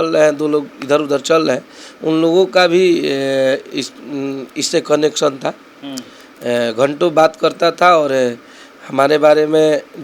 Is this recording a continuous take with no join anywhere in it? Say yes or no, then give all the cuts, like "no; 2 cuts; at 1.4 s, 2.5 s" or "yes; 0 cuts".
yes; 0 cuts